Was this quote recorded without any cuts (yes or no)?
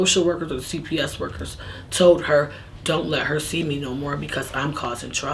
yes